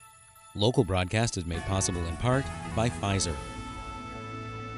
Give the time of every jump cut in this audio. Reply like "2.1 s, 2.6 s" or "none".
3.4 s